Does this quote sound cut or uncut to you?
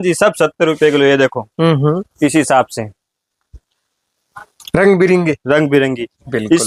uncut